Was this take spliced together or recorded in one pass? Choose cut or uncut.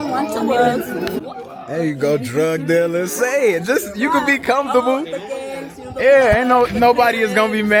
uncut